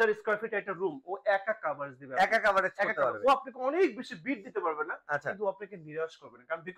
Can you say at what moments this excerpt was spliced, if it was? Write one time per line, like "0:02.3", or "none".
none